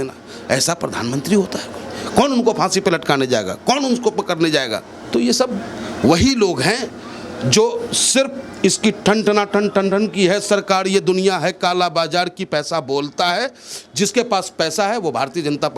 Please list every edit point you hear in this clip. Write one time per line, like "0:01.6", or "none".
0:05.0